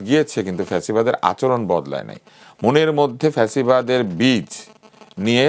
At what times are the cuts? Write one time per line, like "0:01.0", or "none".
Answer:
none